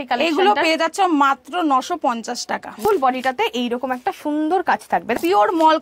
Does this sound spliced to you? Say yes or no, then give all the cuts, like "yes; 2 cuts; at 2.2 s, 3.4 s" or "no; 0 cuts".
yes; 2 cuts; at 2.8 s, 5.1 s